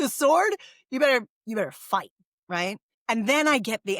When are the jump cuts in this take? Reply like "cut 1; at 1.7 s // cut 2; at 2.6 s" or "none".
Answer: cut 1; at 2.9 s